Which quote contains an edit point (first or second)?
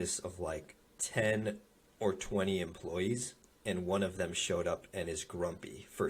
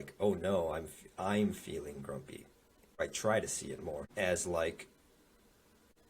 second